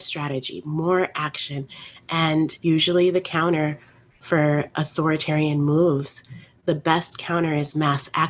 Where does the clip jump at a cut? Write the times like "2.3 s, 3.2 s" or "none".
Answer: 2.6 s